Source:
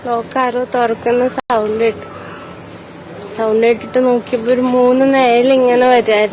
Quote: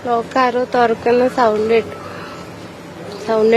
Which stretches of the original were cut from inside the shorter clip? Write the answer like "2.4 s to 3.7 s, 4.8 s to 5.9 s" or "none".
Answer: 1.4 s to 1.5 s

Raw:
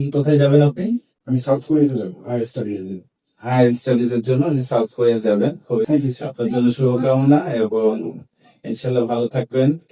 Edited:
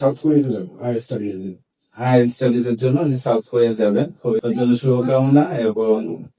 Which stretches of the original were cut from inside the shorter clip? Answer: 5.9 s to 6.4 s

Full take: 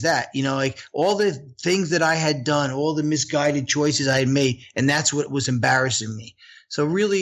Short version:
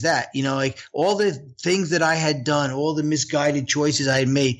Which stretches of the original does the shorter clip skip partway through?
none

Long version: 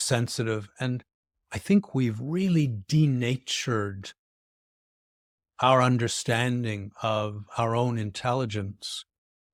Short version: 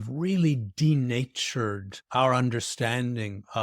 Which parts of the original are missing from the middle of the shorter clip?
4.0 s to 5.4 s

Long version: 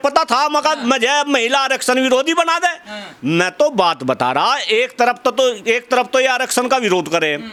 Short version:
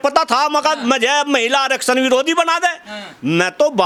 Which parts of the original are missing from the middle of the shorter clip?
none

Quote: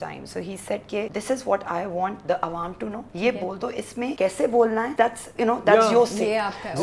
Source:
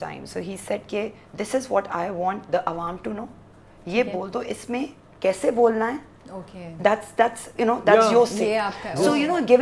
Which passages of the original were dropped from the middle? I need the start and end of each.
1.1 s to 1.3 s, 3.3 s to 3.8 s, 4.9 s to 5.2 s, 5.9 s to 7.1 s

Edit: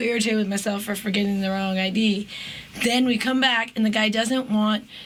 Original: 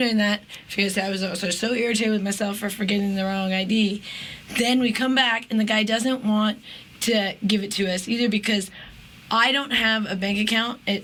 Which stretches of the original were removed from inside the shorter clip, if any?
none

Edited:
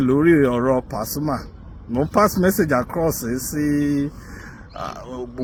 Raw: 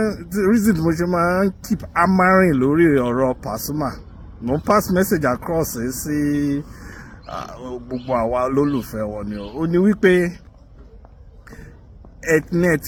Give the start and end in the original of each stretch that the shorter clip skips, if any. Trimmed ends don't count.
none

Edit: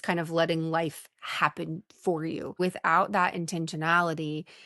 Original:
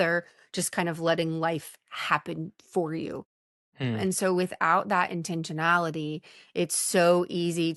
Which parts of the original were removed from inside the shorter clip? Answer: 3.3 s to 4.4 s

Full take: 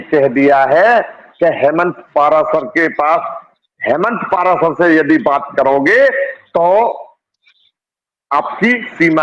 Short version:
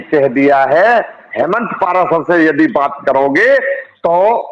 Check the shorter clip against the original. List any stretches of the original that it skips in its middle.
1.2 s to 3.7 s

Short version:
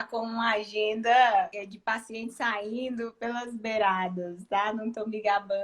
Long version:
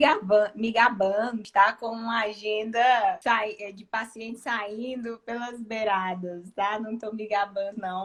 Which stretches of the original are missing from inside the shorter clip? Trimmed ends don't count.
3.2 s to 3.6 s

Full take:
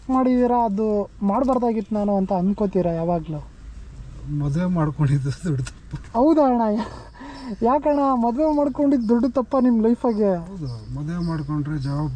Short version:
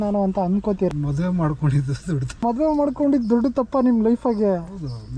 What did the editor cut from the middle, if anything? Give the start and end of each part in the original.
2.8 s to 4.3 s, 5.8 s to 8.2 s

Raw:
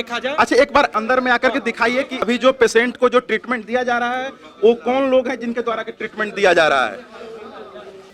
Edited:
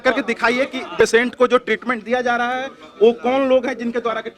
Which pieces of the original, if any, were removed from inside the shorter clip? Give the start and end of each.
2.3 s to 2.6 s

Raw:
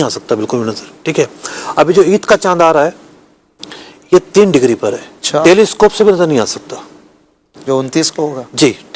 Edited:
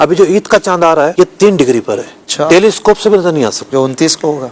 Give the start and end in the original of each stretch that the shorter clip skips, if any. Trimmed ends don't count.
2.9 s to 4.1 s, 6.6 s to 7.6 s

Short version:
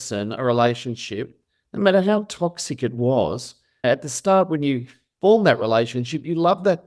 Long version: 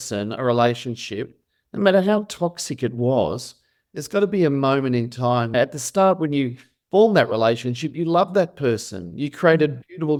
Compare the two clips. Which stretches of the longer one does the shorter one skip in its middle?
3.8 s to 5.5 s

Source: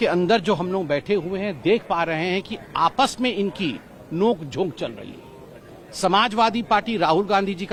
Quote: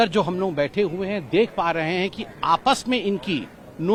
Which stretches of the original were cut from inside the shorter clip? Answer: none

